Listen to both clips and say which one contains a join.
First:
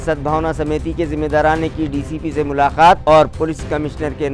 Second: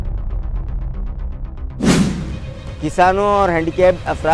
second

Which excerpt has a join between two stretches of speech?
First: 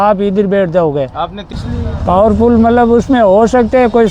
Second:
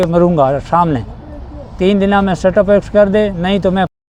first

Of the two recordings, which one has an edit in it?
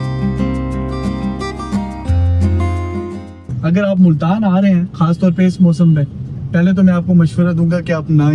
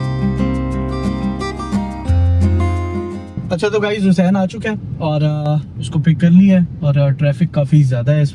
first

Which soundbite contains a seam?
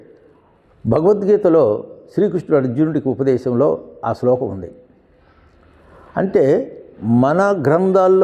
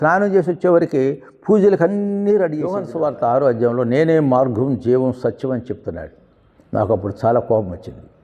second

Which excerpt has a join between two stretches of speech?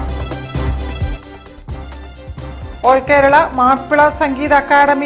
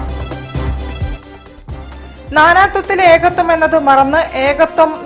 second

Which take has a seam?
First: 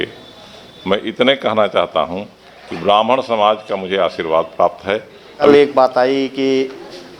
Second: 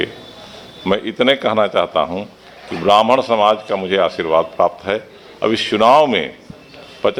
first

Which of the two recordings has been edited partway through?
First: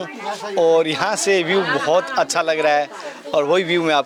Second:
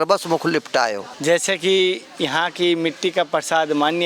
second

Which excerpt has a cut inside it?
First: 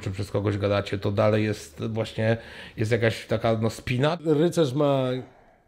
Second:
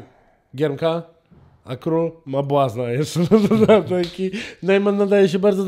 first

